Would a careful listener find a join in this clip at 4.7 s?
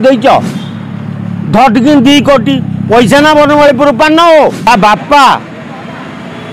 yes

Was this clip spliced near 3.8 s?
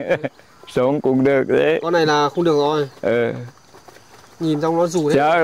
no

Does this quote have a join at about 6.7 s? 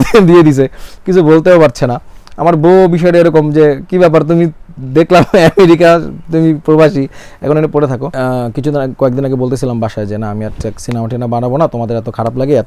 no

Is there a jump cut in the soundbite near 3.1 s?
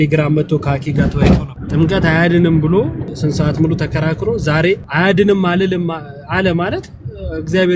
yes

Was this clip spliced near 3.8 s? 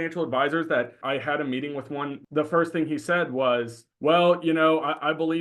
yes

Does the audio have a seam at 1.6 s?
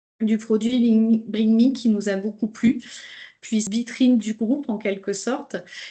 no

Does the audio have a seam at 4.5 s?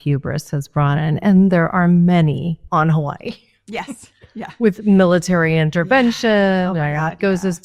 no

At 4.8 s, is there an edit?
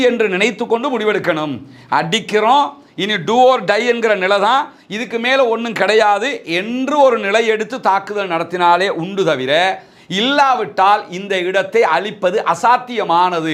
no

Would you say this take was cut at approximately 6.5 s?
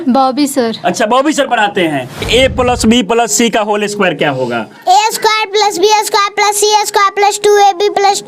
no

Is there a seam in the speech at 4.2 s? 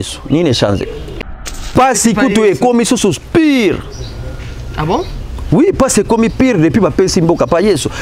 no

